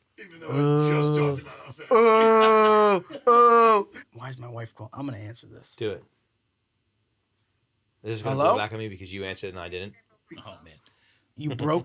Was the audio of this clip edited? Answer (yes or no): yes